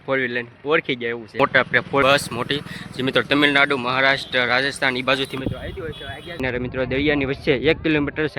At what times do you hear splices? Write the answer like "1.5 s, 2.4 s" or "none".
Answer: 1.4 s, 6.4 s